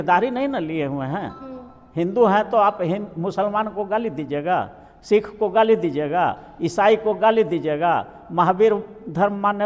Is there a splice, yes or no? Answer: no